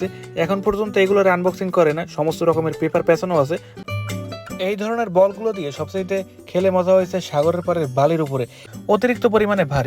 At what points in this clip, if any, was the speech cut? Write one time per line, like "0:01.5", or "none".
0:03.8
0:08.6